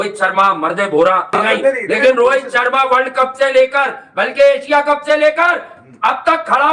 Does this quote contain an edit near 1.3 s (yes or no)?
yes